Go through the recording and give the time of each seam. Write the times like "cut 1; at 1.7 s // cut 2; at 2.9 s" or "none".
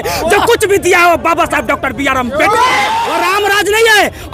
cut 1; at 3.1 s

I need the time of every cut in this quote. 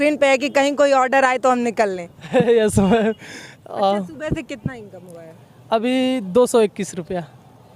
none

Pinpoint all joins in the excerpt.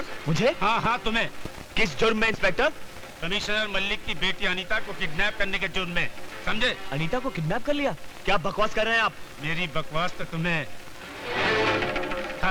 none

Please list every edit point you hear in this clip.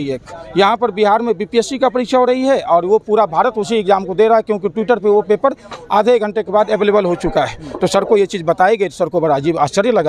none

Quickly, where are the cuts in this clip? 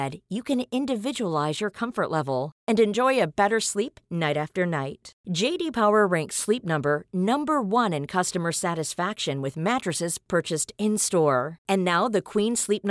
none

